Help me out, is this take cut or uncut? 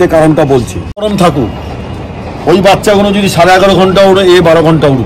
cut